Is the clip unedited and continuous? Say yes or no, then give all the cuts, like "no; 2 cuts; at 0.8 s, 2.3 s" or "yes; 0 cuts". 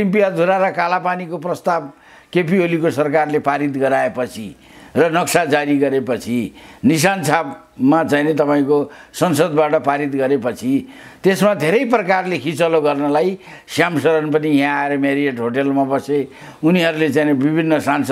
yes; 0 cuts